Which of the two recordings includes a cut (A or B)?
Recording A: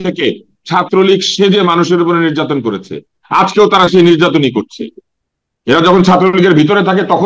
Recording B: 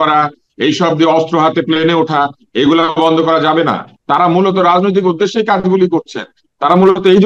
B